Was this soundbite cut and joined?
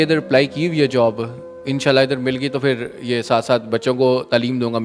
no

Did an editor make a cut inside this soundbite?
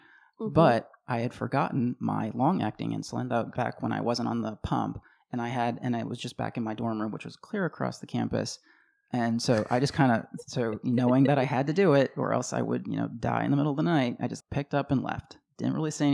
no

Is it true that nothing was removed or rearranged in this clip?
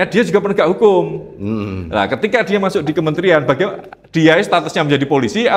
yes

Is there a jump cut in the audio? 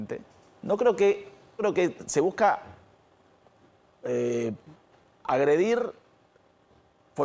yes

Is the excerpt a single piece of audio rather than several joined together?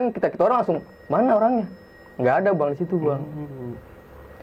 yes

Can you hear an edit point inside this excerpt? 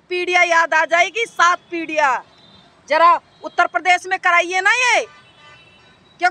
no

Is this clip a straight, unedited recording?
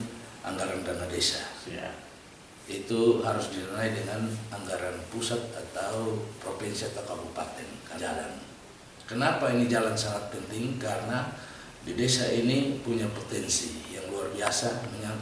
no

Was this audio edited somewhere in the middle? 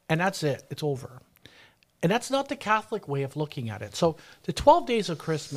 no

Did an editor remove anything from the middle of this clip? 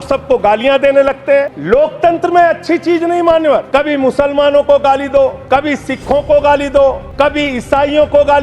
yes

